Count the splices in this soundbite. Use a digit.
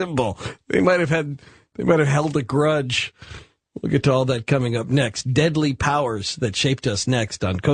0